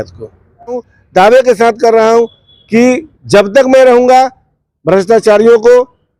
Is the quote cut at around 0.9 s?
yes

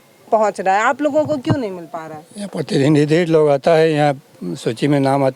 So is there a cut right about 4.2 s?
no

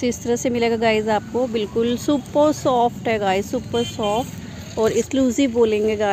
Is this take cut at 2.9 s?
no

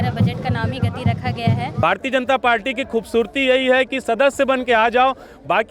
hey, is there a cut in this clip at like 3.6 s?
no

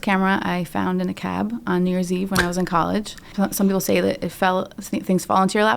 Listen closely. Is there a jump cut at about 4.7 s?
no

